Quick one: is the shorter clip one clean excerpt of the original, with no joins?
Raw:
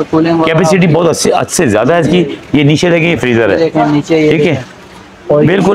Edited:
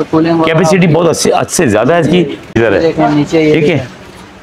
no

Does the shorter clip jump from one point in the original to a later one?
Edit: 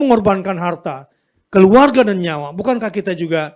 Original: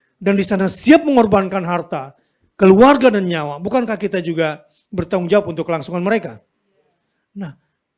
no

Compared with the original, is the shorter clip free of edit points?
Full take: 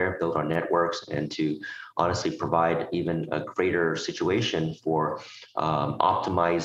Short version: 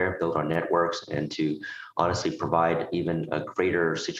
yes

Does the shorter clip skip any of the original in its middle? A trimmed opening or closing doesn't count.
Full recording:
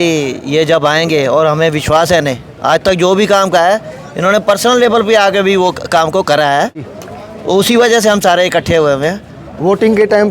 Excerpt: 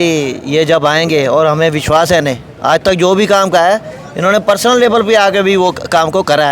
no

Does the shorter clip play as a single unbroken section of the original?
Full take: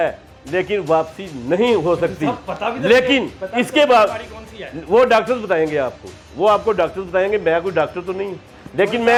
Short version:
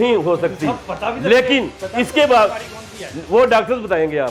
yes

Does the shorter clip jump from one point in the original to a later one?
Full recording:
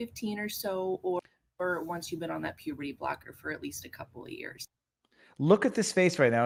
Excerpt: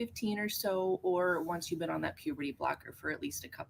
yes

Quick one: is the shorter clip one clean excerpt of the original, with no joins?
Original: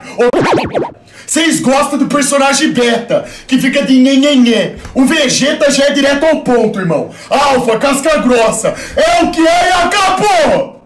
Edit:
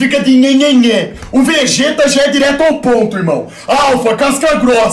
yes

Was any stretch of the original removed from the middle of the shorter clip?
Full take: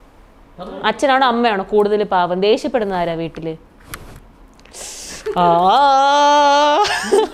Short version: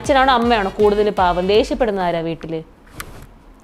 no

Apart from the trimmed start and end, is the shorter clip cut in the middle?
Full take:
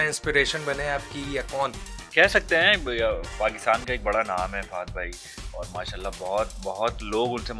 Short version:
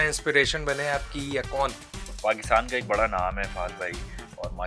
yes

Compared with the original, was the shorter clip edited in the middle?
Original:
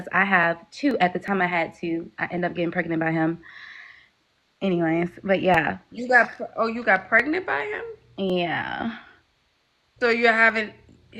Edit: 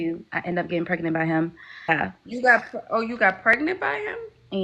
yes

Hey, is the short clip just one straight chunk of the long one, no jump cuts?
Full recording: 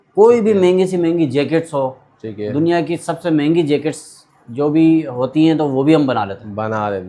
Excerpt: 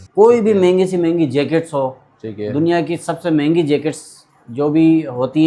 yes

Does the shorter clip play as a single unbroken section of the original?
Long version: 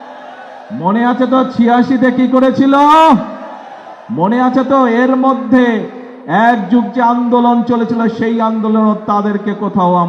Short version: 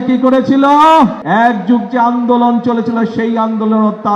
no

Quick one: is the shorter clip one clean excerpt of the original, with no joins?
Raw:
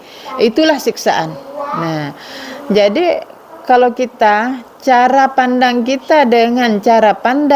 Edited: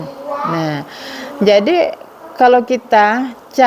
yes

